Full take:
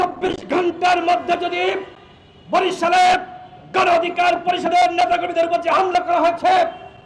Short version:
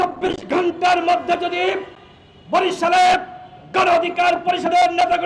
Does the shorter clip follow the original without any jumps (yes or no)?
yes